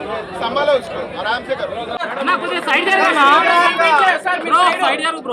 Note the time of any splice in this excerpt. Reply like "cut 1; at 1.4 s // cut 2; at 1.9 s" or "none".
cut 1; at 2.0 s